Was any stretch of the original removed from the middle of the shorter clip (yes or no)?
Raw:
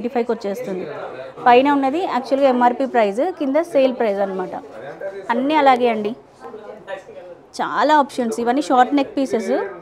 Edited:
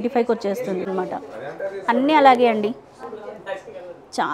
yes